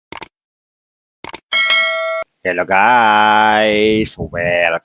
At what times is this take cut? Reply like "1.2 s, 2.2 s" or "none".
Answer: 2.2 s